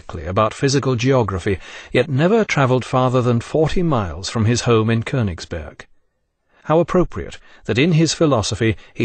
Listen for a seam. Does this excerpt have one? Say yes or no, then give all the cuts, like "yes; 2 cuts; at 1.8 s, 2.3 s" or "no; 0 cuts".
no; 0 cuts